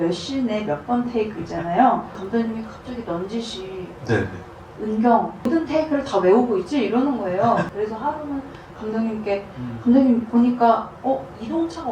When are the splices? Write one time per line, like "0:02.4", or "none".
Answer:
0:02.2
0:05.5
0:07.7